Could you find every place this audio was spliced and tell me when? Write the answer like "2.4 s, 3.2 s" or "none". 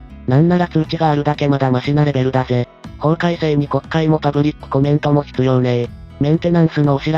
none

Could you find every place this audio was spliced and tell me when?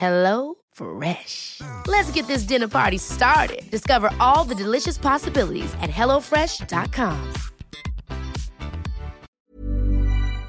9.3 s

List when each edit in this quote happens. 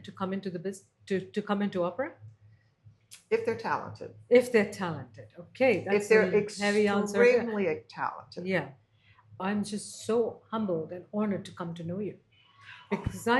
9.4 s

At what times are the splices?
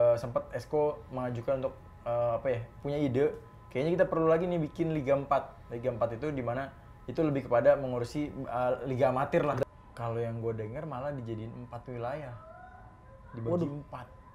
9.6 s

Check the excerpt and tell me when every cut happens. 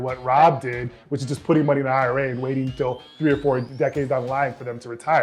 3.7 s

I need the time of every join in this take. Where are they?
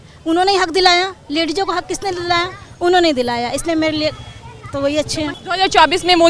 5.3 s

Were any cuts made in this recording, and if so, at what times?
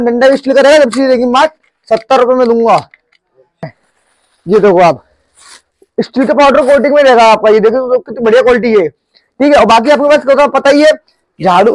3.7 s

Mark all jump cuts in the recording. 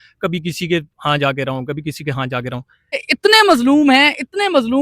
2.9 s

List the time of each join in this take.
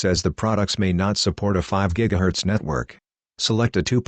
none

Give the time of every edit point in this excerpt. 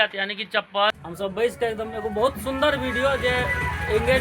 1.0 s

